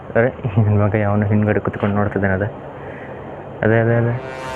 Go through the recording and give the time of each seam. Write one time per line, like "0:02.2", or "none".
none